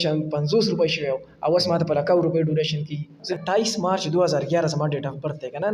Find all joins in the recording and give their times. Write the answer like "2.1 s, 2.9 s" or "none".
3.3 s